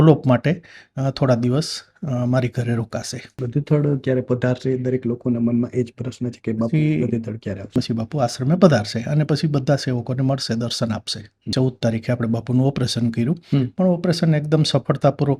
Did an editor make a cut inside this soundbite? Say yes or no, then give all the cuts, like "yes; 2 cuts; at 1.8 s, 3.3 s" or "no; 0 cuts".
yes; 3 cuts; at 3.4 s, 7.7 s, 11.5 s